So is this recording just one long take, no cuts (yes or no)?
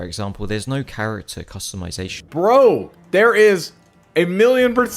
no